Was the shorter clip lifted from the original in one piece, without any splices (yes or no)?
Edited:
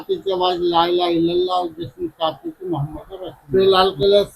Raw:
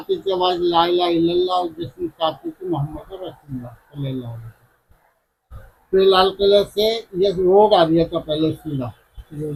no